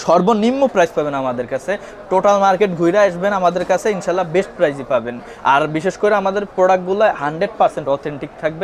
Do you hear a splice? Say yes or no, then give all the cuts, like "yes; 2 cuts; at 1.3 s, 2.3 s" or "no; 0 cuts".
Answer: no; 0 cuts